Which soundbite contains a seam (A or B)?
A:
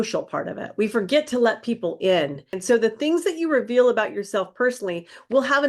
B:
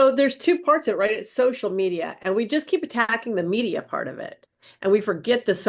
A